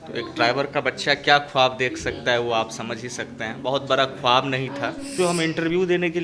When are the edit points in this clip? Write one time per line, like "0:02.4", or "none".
0:05.2